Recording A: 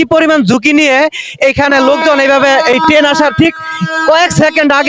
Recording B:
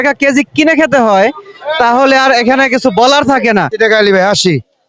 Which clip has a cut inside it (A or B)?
B